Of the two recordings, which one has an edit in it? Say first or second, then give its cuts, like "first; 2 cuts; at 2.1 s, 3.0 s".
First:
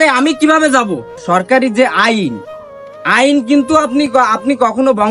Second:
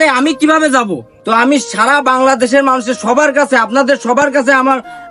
first; 1 cut; at 1.2 s